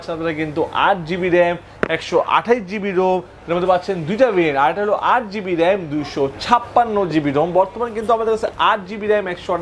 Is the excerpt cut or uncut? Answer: uncut